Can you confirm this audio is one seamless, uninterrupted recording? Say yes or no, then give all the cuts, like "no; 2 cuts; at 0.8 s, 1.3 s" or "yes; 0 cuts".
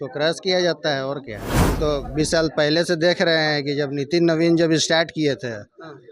no; 1 cut; at 1.5 s